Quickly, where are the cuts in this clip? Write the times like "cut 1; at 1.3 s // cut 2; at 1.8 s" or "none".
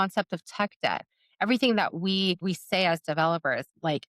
cut 1; at 2.4 s

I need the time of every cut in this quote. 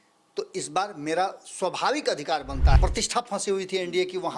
cut 1; at 2.8 s

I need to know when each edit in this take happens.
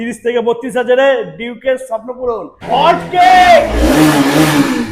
cut 1; at 2.5 s

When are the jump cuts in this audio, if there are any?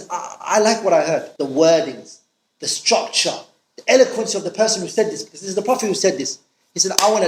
cut 1; at 1.3 s

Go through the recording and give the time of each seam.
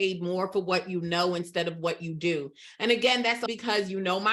cut 1; at 3.4 s

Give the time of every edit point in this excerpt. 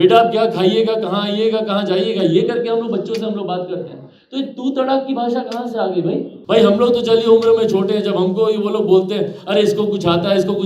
cut 1; at 6.3 s

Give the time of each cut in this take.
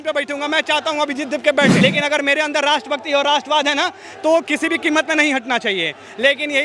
cut 1; at 1.8 s

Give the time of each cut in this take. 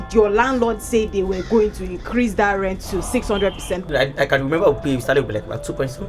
cut 1; at 3.8 s

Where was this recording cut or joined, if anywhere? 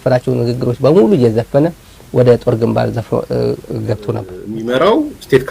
cut 1; at 4.4 s

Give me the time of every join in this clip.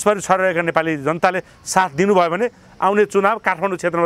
none

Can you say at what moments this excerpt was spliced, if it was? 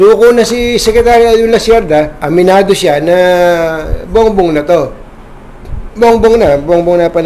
cut 1; at 2.2 s

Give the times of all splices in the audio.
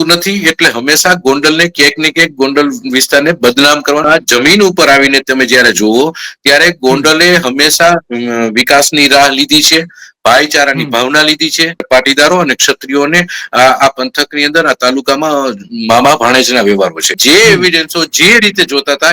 cut 1; at 4.0 s // cut 2; at 11.9 s // cut 3; at 17.2 s

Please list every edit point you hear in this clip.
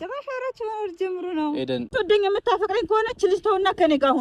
cut 1; at 1.9 s

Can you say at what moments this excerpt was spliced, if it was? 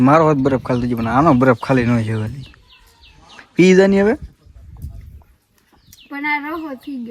none

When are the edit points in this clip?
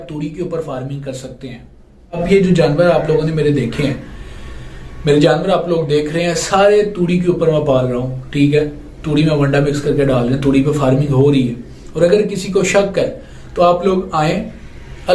cut 1; at 2.1 s

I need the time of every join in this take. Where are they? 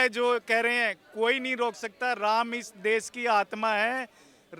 none

